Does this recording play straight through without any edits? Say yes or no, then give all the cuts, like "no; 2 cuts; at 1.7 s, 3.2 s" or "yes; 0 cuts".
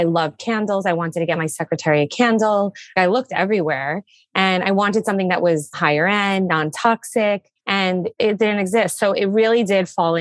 no; 2 cuts; at 2.9 s, 5.7 s